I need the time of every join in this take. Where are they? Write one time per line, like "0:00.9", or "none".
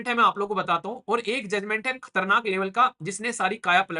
none